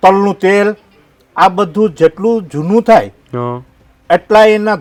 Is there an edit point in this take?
no; 0 cuts

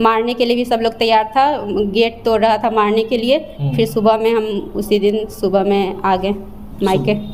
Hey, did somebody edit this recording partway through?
no; 0 cuts

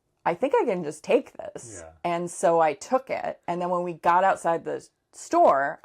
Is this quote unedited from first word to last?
yes; 0 cuts

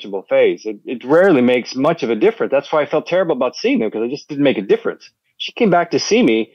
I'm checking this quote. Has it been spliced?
no; 0 cuts

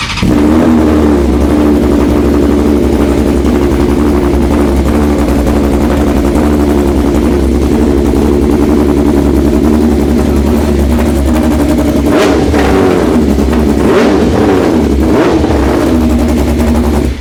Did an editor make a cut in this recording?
no; 0 cuts

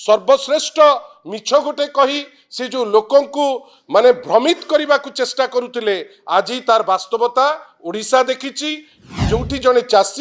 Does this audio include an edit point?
yes; 1 cut; at 9.1 s

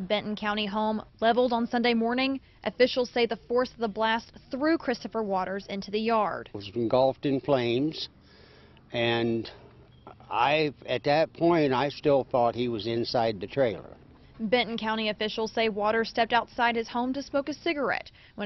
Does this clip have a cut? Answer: yes; 1 cut; at 13.1 s

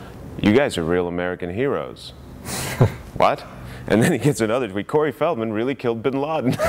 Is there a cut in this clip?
no; 0 cuts

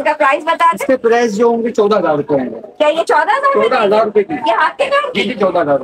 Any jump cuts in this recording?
no; 0 cuts

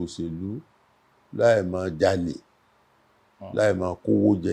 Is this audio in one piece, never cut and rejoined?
yes; 0 cuts

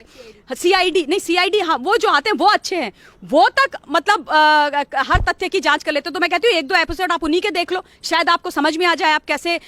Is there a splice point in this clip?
no; 0 cuts

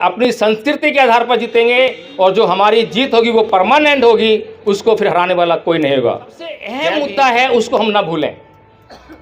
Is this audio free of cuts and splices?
no; 1 cut; at 6.7 s

